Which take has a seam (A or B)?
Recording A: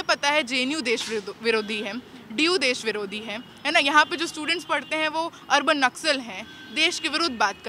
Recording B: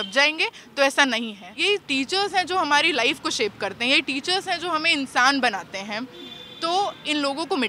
B